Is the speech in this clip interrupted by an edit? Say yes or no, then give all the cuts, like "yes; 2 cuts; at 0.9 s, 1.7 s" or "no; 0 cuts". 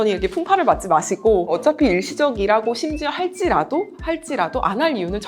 yes; 1 cut; at 1.6 s